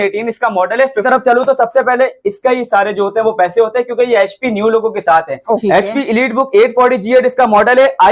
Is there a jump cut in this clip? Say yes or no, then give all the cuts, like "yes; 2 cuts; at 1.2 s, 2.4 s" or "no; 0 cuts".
yes; 2 cuts; at 1.0 s, 5.6 s